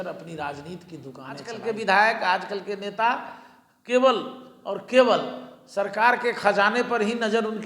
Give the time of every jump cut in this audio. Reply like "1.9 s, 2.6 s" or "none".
1.5 s

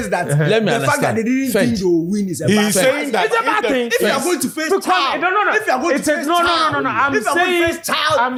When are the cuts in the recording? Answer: none

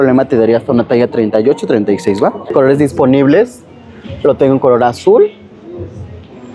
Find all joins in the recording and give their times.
2.4 s

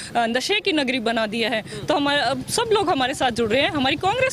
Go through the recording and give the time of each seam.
none

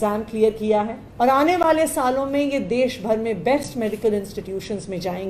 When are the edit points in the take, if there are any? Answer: 1.0 s

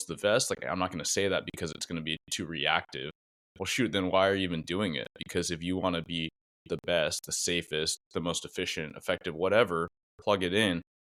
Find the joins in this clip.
none

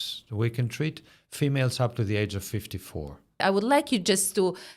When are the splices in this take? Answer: 3.4 s

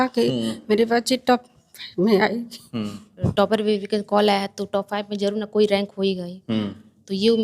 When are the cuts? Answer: 3.3 s

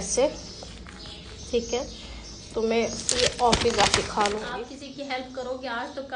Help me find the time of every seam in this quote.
4.5 s

